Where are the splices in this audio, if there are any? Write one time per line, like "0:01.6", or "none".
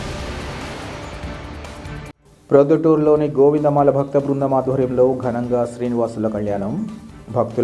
0:02.1

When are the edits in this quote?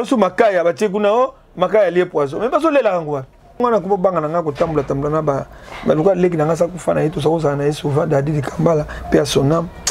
0:03.6

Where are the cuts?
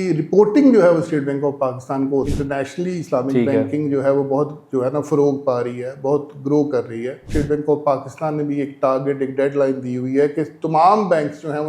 0:02.3
0:07.2

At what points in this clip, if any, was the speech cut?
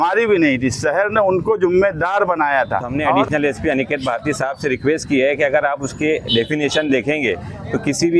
0:03.2

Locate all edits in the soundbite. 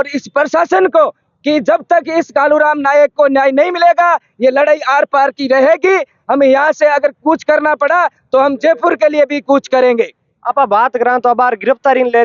none

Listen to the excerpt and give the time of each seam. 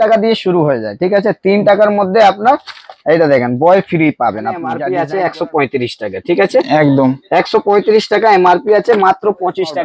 0:04.7

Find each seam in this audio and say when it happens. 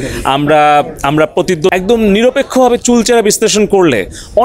0:01.7

